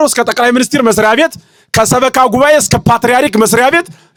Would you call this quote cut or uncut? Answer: uncut